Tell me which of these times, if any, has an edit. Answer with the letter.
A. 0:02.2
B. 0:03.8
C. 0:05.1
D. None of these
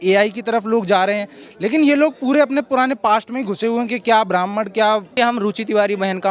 C